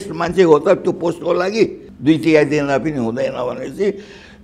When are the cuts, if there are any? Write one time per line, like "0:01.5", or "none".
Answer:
0:01.9

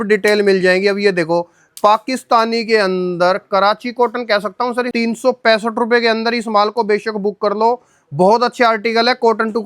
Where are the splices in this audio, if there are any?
0:04.9

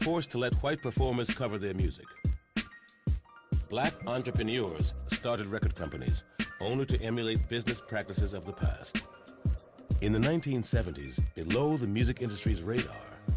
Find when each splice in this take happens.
none

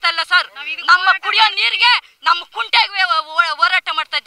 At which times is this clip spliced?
none

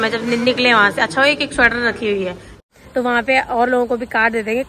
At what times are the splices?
0:02.7

